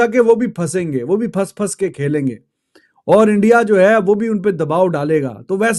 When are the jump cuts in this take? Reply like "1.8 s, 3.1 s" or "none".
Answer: none